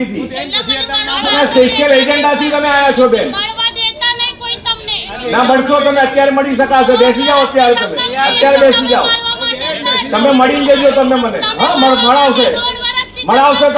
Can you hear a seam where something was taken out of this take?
no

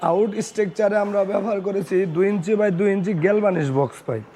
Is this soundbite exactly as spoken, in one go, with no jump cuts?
yes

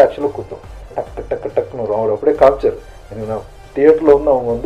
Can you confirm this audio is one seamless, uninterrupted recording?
no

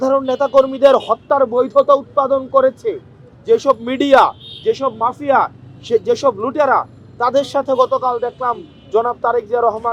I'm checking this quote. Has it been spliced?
no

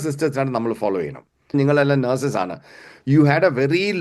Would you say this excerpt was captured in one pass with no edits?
no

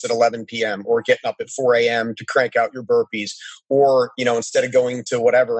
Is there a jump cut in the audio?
no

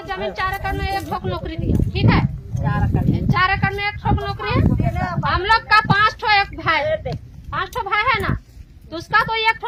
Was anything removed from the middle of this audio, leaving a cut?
no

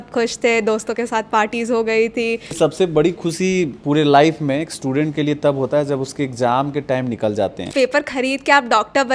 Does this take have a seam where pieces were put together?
yes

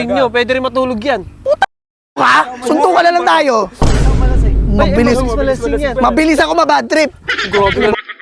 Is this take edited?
no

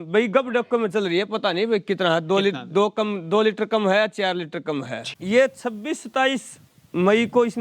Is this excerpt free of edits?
no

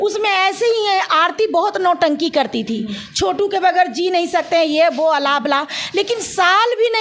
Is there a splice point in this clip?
no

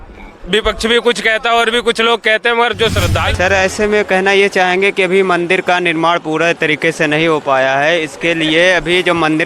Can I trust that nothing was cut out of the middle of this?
no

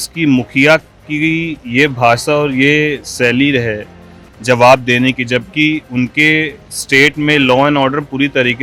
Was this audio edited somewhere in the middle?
no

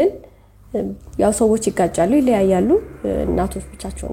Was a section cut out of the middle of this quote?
no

